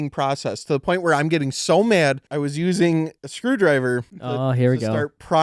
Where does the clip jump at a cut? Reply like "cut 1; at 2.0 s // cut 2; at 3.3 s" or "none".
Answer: cut 1; at 2.2 s // cut 2; at 3.2 s // cut 3; at 4.1 s

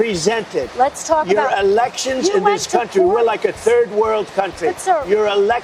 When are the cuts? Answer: none

